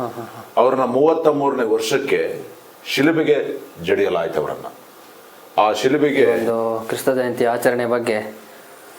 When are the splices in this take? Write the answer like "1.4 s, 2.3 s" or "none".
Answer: 6.4 s